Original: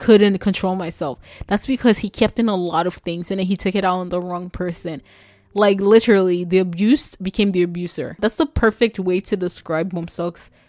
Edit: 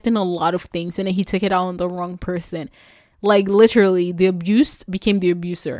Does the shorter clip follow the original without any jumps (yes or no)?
yes